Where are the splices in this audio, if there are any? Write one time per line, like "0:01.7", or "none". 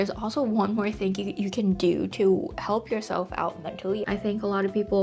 0:04.0